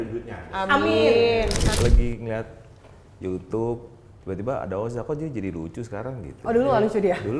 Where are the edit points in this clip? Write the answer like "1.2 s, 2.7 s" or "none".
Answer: 1.7 s